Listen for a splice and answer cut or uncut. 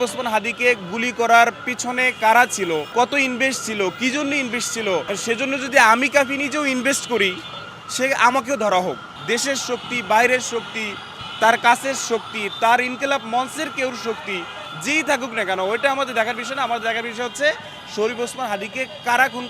cut